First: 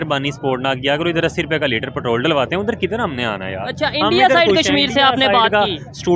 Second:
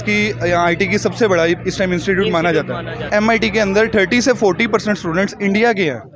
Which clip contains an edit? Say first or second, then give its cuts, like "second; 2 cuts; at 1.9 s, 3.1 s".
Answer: second; 1 cut; at 3.1 s